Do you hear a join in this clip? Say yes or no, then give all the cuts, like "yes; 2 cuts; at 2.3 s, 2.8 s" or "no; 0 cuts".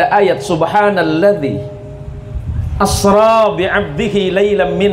no; 0 cuts